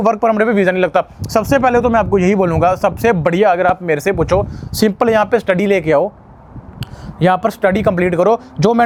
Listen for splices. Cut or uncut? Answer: uncut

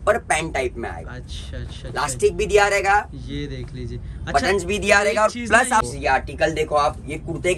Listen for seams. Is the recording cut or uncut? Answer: cut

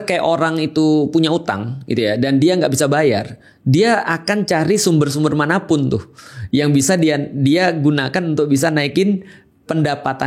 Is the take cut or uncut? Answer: uncut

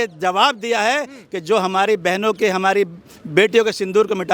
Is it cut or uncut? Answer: uncut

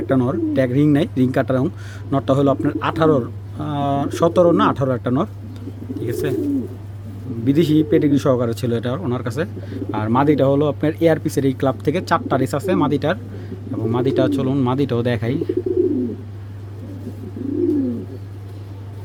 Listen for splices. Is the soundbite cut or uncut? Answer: uncut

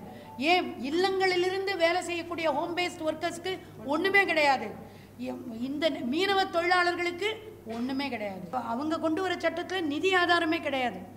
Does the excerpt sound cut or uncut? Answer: cut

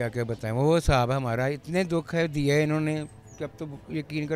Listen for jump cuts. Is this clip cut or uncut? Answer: uncut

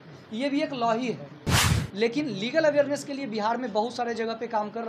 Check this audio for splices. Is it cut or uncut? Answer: cut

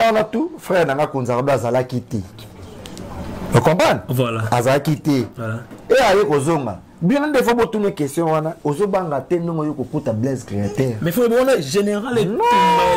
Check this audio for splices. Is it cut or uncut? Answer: uncut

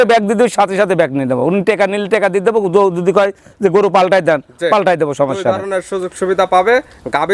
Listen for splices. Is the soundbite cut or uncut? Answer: uncut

